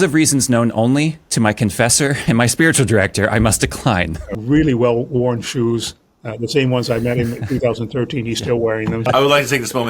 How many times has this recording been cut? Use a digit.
2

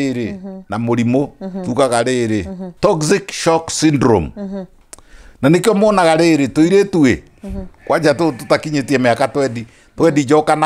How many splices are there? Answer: 1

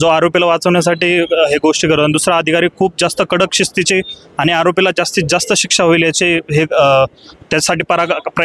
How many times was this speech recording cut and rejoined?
0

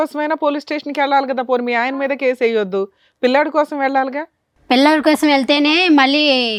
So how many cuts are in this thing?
0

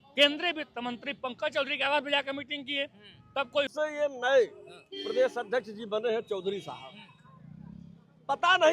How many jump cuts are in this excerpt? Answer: 1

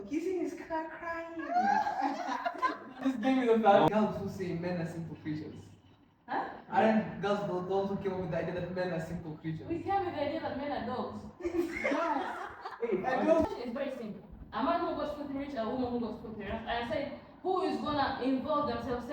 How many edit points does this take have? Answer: 2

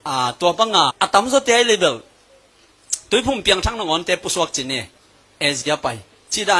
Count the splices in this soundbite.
1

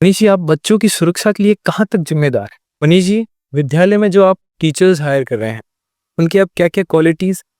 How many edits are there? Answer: 1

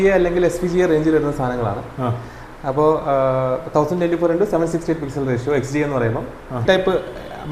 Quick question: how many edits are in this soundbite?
1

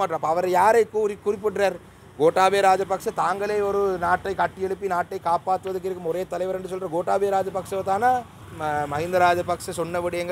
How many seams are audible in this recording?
1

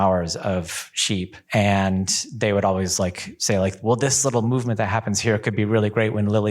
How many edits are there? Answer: 1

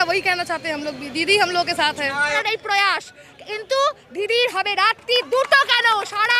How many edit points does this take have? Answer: 1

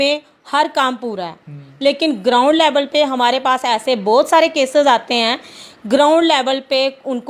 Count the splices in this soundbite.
0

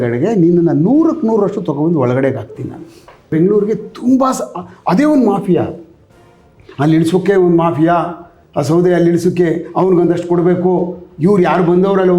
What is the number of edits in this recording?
1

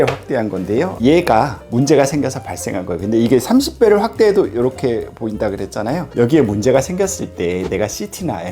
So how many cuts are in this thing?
2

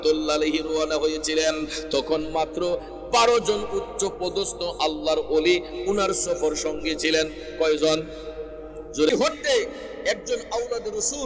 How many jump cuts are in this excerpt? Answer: 1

